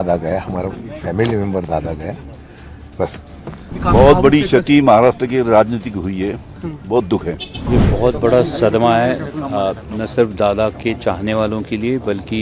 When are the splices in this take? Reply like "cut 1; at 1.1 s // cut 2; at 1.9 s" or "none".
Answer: cut 1; at 3.7 s // cut 2; at 7.5 s